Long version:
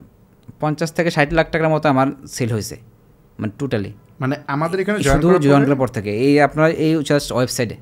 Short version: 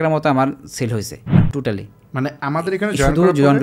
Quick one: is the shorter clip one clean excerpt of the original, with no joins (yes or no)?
no